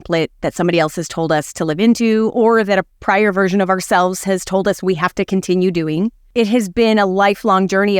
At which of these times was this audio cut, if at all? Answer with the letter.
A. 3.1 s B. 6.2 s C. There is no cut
B